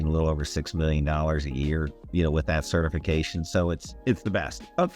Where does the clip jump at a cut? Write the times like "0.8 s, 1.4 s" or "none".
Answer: 2.0 s, 3.9 s

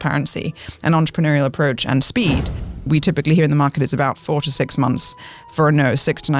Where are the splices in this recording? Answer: 2.9 s

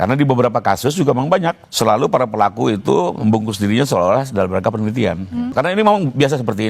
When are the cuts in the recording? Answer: 1.6 s, 5.5 s

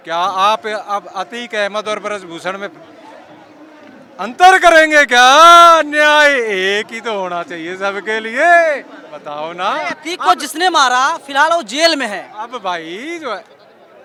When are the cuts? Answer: none

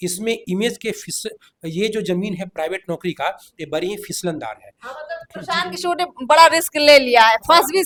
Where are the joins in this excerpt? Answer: none

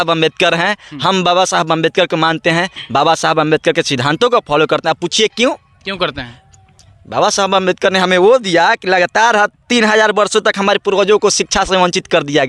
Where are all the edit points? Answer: none

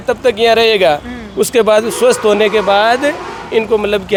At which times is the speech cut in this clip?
none

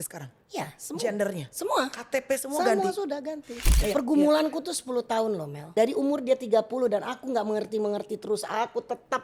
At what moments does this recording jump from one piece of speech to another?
3.7 s, 5.6 s

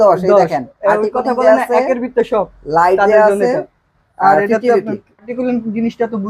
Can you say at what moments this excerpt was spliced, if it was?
5.3 s

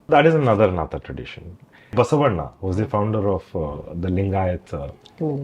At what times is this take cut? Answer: 1.9 s

